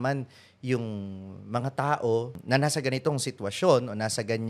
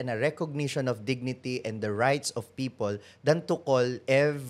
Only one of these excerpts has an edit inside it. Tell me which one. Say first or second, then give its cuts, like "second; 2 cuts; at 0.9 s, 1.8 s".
first; 1 cut; at 2.4 s